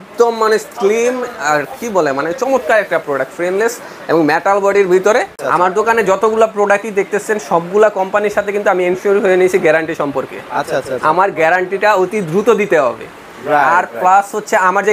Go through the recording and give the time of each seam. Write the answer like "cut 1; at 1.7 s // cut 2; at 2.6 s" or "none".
cut 1; at 5.4 s